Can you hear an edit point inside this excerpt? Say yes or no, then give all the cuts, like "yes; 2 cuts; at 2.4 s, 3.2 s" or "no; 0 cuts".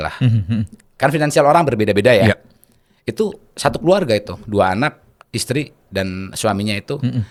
no; 0 cuts